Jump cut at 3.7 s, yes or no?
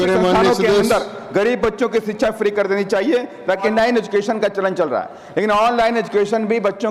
yes